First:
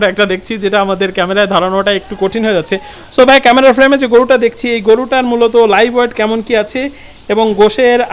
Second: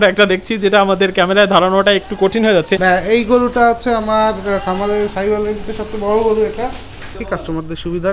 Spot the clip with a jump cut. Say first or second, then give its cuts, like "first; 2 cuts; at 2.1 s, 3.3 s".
second; 2 cuts; at 2.8 s, 7.2 s